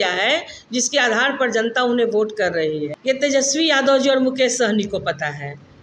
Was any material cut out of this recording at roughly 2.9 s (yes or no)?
yes